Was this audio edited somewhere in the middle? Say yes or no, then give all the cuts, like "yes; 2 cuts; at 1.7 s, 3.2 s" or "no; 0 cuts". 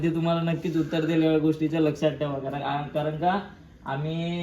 no; 0 cuts